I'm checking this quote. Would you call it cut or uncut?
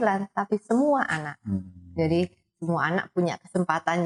uncut